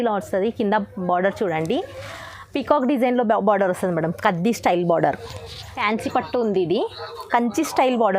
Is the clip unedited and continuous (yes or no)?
no